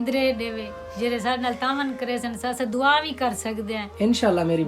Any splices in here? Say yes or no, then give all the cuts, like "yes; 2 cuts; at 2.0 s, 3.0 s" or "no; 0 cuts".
no; 0 cuts